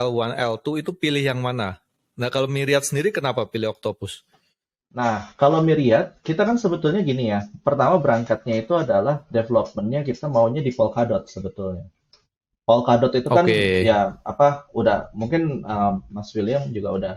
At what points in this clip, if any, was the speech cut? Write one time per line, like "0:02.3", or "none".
none